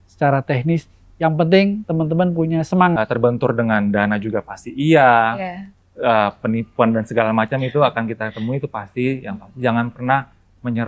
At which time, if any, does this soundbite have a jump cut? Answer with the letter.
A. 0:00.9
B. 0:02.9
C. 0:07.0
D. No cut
B